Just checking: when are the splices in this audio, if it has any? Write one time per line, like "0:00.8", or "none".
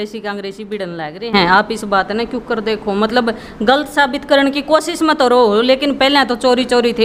none